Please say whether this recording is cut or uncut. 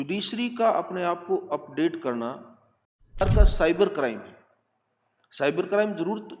cut